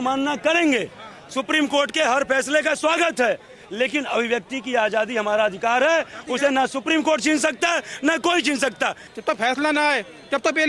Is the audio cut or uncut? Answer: cut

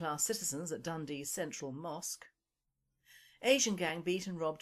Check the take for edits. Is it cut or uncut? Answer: cut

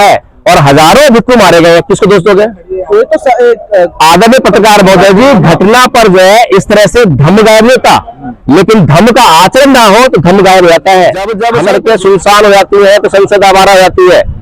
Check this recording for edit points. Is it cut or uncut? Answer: cut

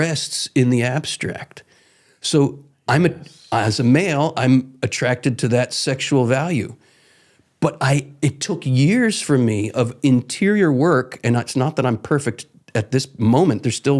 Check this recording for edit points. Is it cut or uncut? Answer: uncut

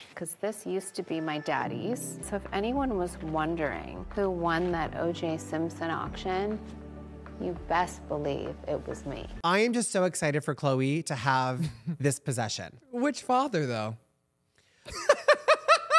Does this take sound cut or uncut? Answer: cut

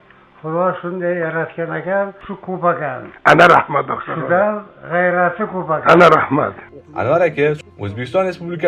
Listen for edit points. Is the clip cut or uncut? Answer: cut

